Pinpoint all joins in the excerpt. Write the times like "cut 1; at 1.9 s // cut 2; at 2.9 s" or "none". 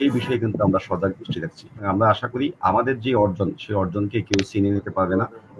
cut 1; at 1.8 s